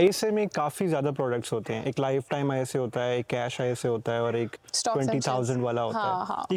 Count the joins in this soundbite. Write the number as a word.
zero